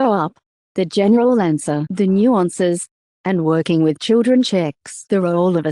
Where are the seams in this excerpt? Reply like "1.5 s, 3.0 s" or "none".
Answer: 4.3 s

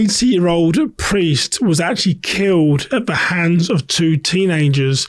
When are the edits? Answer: none

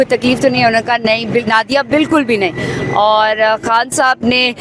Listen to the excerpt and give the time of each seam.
none

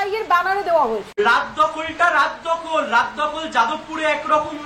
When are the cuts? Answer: 1.1 s

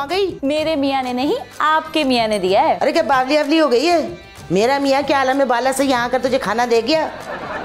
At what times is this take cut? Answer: none

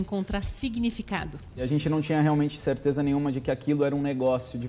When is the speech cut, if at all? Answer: 1.6 s

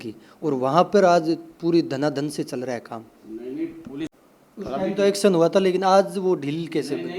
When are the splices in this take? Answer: 4.1 s

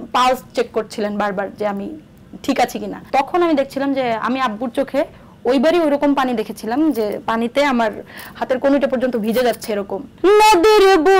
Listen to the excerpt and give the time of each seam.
3.0 s, 10.0 s

